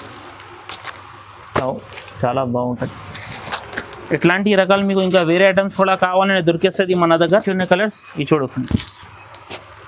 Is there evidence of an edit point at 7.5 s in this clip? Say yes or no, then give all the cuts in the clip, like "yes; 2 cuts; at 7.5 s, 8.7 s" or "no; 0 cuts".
yes; 1 cut; at 7.5 s